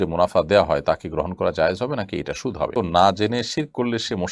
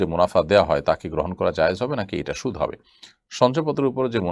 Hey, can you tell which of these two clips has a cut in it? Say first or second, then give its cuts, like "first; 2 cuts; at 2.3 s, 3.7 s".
first; 1 cut; at 2.7 s